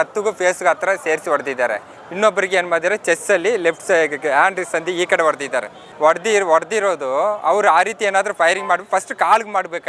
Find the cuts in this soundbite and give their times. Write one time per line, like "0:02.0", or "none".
none